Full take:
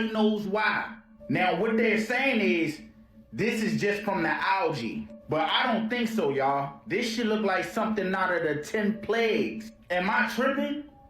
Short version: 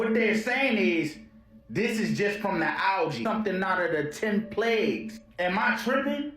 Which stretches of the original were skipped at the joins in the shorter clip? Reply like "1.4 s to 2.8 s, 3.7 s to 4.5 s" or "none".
4.8 s to 7.7 s

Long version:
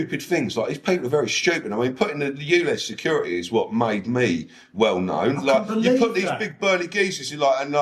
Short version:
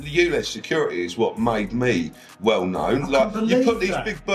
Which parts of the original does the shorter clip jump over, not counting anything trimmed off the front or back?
none

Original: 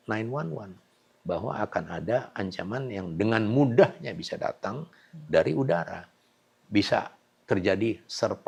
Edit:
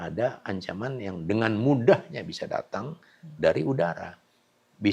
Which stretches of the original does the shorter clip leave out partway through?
none

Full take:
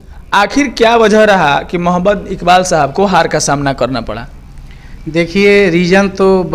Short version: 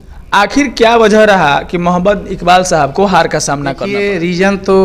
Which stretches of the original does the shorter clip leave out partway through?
3.8 s to 5.4 s

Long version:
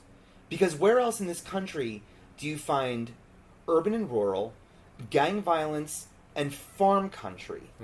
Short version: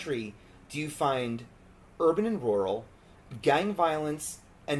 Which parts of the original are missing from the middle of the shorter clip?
none

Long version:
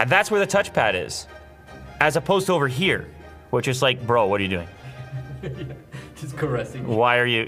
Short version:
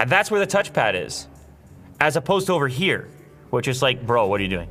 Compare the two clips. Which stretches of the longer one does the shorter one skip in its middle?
none

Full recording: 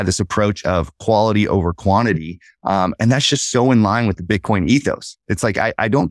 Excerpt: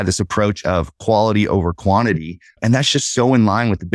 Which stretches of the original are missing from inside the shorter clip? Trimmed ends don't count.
2.6 s to 2.9 s

